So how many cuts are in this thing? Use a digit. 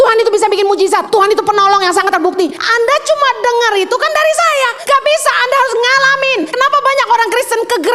4